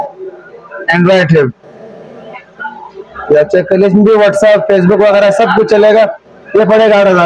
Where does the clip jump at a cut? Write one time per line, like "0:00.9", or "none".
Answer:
none